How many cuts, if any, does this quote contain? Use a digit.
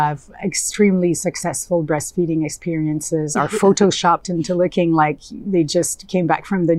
0